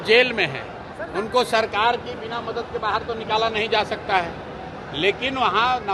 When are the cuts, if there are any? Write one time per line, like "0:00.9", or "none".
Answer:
none